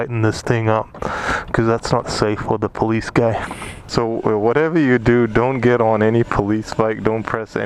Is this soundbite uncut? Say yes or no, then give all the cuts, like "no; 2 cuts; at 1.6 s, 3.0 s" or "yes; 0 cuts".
no; 1 cut; at 3.9 s